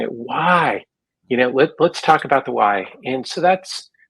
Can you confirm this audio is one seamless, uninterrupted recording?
yes; 0 cuts

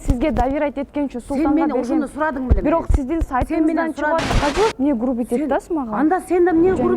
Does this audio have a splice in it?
yes; 1 cut; at 4.3 s

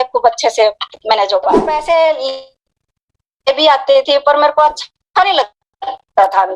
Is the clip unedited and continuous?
no; 1 cut; at 1.7 s

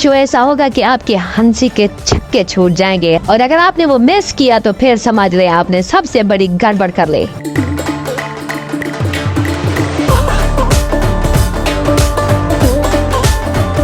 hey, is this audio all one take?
yes; 0 cuts

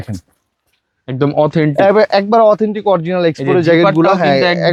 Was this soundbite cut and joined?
no; 0 cuts

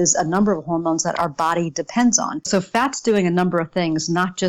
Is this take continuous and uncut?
no; 1 cut; at 2.5 s

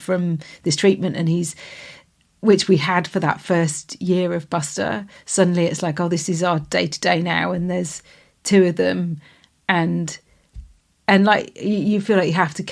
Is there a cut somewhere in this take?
no; 0 cuts

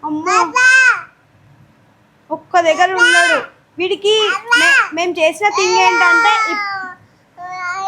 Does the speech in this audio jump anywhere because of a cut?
no; 0 cuts

